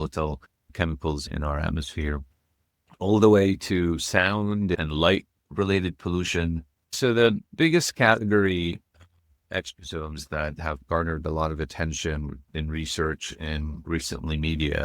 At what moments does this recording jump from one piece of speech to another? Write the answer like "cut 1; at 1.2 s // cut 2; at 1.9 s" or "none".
cut 1; at 7.0 s